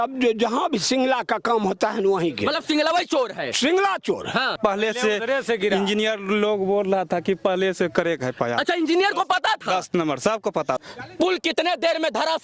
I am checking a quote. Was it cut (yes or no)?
yes